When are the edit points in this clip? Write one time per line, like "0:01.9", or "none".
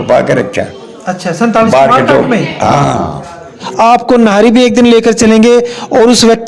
0:03.7